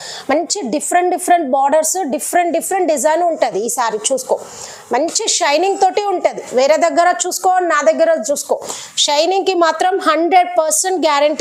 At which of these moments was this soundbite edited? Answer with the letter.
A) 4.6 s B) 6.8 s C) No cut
C